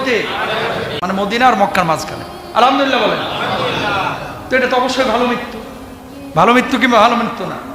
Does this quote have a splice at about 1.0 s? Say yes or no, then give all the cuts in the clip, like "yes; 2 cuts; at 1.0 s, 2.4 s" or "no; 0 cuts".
yes; 1 cut; at 1.0 s